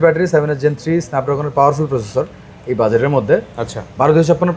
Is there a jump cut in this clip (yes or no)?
no